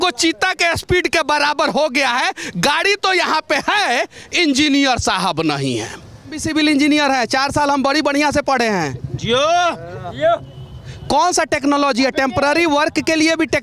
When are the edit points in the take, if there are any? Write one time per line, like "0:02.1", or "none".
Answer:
0:06.4